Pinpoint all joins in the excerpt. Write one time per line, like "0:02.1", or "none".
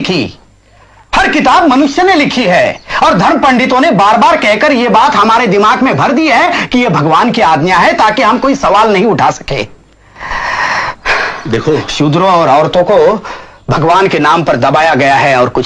none